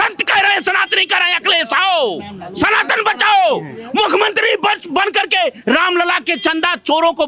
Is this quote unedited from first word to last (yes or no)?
yes